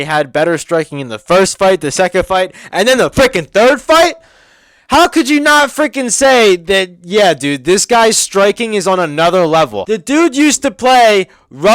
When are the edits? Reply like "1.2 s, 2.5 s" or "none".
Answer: 9.8 s